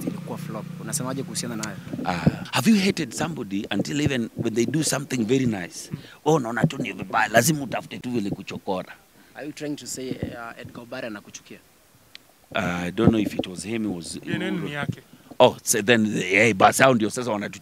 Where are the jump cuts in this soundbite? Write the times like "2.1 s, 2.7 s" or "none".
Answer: 2.4 s, 9.3 s